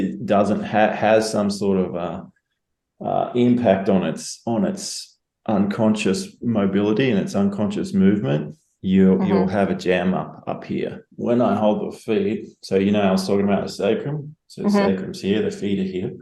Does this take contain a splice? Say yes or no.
yes